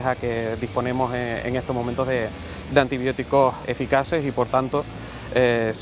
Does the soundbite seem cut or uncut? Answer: uncut